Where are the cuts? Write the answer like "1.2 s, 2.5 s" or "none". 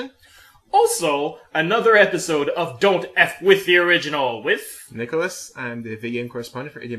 none